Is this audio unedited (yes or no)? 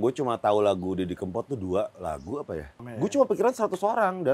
no